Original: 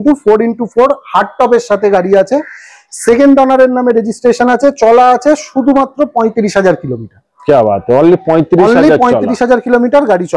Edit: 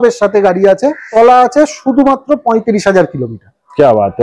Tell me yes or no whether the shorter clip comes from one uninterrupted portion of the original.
no